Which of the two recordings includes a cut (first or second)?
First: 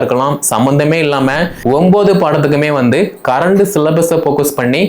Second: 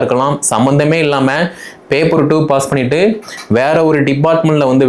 first